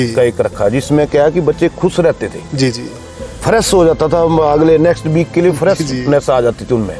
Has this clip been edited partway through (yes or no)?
no